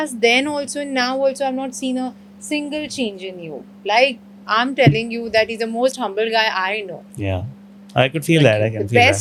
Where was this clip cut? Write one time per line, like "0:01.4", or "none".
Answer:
none